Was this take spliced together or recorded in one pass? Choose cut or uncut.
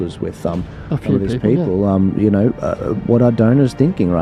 uncut